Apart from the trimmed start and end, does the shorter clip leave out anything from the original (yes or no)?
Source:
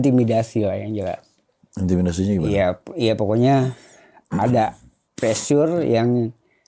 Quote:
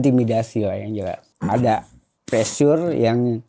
yes